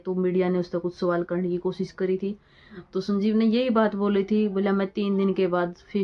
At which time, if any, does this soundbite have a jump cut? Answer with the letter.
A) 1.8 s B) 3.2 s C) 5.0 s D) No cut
D